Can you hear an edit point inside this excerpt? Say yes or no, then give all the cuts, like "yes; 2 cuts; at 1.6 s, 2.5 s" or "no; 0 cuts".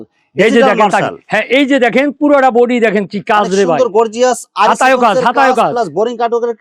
no; 0 cuts